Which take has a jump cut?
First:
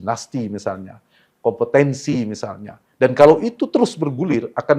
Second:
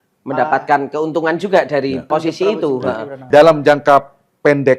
second; 2 cuts; at 2.0 s, 3.2 s

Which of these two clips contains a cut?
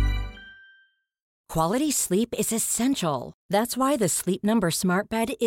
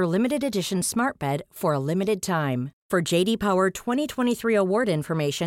first; 1 cut; at 1.4 s

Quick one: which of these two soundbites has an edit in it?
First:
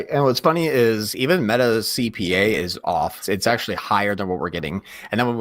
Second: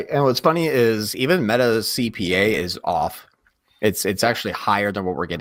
first; 1 cut; at 3.2 s

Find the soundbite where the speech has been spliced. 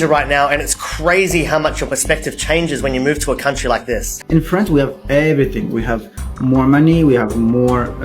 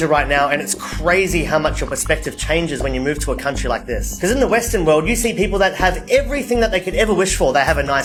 first; 1 cut; at 4.1 s

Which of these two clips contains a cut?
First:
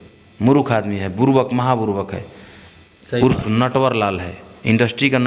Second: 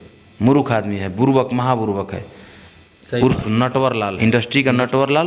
second; 1 cut; at 4.1 s

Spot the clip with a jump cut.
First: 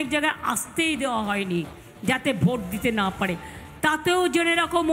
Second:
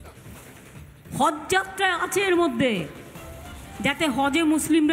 second; 1 cut; at 1.1 s

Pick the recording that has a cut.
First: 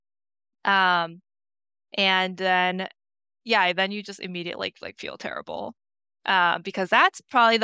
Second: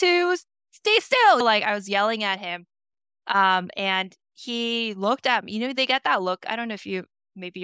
second; 1 cut; at 1.4 s

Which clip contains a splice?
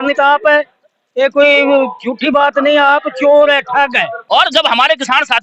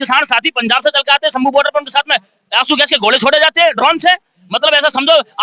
first; 1 cut; at 4.1 s

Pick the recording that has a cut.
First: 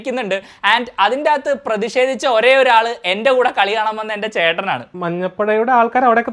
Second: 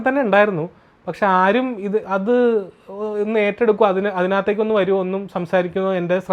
first; 1 cut; at 4.9 s

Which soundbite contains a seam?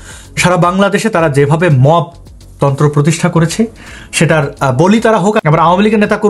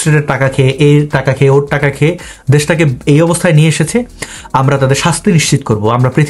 first; 1 cut; at 5.4 s

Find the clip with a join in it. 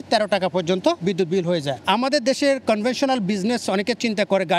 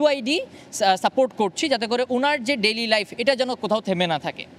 first; 1 cut; at 1.4 s

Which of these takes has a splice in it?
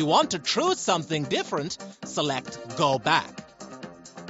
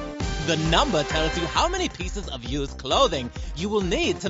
first; 1 cut; at 3.2 s

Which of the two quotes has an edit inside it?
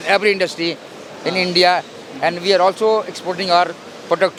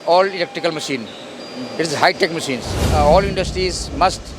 second; 1 cut; at 2.8 s

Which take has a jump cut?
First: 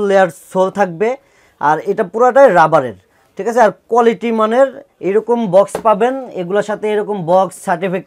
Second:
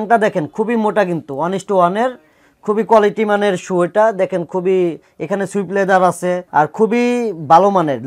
second; 1 cut; at 6.4 s

